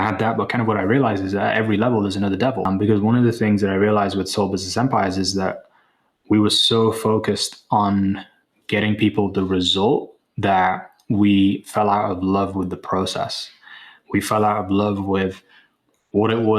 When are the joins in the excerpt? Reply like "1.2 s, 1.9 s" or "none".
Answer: 2.7 s